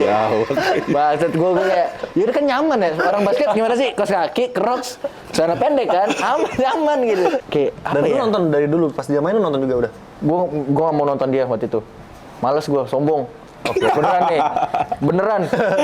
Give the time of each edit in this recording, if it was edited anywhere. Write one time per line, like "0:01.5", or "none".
0:07.4